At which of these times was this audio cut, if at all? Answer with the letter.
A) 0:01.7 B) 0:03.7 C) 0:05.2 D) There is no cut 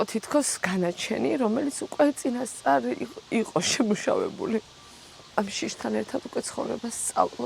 C